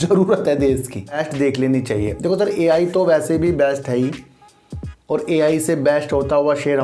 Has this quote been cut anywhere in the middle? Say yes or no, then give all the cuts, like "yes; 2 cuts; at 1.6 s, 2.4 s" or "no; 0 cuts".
yes; 1 cut; at 1.2 s